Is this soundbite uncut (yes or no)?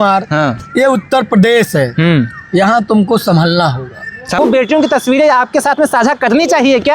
no